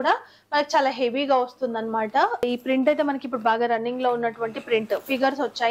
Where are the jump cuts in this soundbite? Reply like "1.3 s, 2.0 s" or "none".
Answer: 2.4 s